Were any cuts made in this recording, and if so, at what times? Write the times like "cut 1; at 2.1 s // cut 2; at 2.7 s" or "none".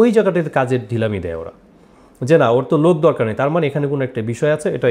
none